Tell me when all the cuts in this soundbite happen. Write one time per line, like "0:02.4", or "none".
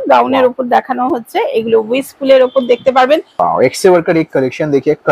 0:03.3